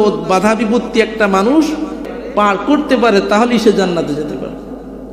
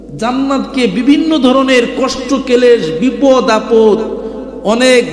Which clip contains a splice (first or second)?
first